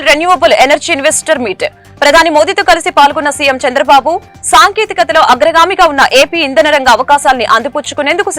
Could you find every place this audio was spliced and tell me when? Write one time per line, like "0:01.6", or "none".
none